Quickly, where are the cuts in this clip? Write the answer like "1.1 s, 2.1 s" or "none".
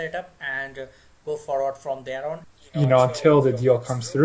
2.6 s